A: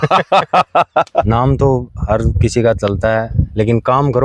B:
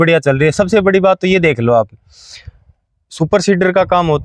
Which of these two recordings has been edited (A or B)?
A